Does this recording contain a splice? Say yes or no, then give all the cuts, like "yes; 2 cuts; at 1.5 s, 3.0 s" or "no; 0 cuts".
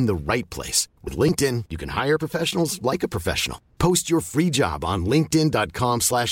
no; 0 cuts